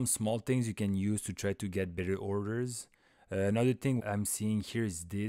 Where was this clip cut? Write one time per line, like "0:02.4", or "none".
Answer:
0:04.0